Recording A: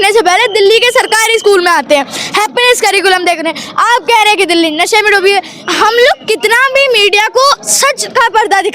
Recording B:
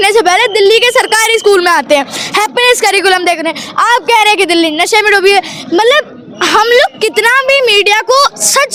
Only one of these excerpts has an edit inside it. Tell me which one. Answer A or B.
A